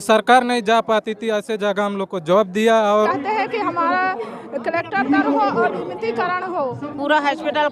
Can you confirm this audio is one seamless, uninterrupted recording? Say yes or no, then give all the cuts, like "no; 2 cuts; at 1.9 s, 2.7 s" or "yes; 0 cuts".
no; 2 cuts; at 3.1 s, 6.8 s